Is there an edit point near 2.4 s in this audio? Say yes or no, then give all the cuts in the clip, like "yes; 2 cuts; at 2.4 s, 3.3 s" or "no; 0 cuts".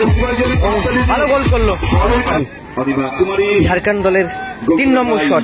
yes; 1 cut; at 2.4 s